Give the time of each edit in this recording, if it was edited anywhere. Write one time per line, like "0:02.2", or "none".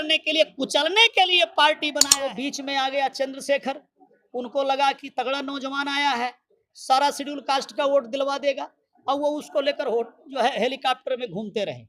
0:02.0